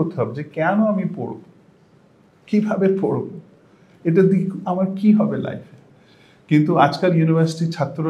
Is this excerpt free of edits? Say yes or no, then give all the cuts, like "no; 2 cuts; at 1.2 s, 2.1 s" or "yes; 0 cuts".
yes; 0 cuts